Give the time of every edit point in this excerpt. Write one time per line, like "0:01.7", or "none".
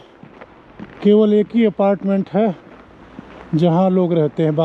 none